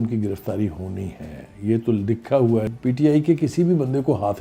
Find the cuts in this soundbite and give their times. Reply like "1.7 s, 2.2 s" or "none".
2.7 s